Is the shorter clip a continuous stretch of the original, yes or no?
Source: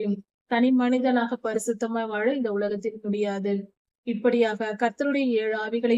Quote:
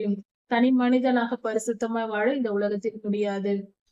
yes